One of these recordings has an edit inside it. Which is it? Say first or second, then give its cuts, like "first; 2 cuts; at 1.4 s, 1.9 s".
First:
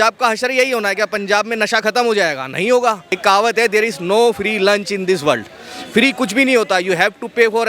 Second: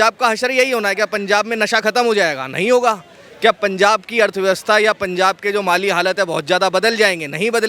first; 1 cut; at 3.1 s